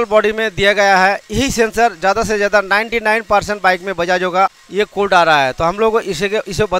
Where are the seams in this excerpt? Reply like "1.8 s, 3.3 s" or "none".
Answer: 4.6 s